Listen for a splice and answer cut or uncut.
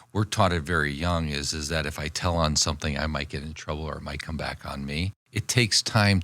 cut